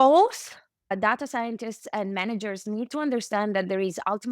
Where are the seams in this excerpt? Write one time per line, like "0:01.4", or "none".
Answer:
0:01.0